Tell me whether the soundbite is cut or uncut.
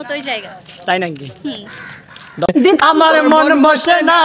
cut